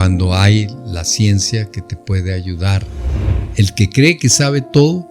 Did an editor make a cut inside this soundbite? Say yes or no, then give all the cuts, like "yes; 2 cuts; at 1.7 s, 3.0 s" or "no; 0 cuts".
yes; 1 cut; at 3.3 s